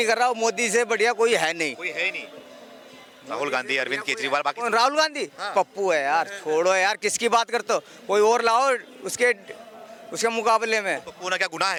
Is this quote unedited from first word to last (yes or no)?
yes